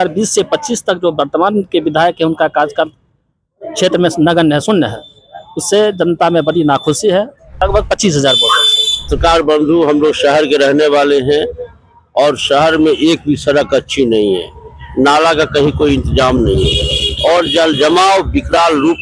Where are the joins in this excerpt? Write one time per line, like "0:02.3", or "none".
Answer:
0:07.5
0:09.1